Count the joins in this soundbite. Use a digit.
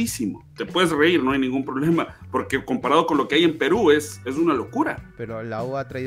1